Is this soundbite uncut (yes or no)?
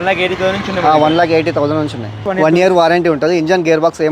no